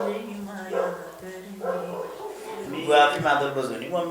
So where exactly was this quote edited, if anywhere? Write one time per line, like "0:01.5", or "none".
0:02.6

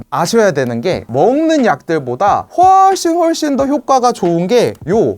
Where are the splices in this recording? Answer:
0:01.0

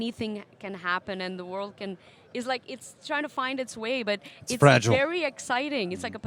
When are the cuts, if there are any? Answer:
none

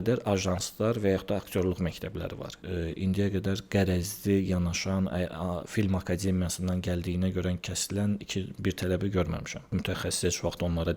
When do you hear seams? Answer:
0:02.6
0:09.7

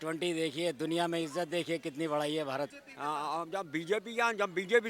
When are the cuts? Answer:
0:02.8

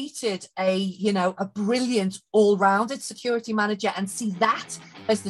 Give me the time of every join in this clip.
none

